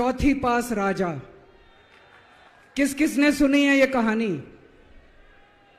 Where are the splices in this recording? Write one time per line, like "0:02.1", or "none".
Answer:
0:02.5